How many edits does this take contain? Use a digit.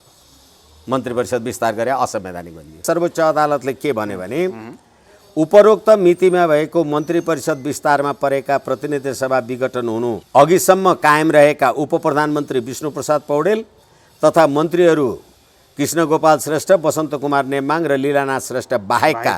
2